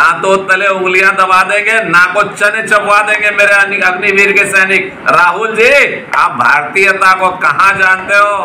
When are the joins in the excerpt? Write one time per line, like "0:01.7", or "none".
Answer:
none